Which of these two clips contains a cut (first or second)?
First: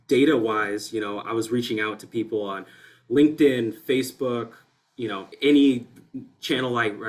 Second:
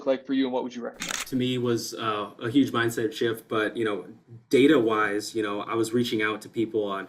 second